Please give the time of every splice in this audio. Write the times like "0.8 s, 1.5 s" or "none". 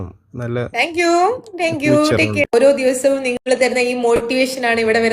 2.4 s